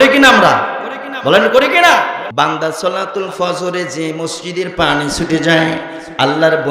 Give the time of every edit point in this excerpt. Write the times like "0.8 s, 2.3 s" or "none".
2.2 s